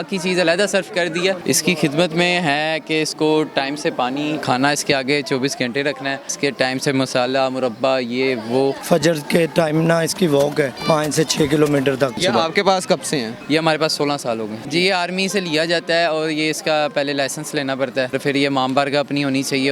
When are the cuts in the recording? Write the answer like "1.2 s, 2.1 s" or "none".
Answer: 1.4 s, 4.4 s, 6.3 s, 8.8 s, 10.8 s, 12.2 s, 13.3 s, 14.6 s, 18.1 s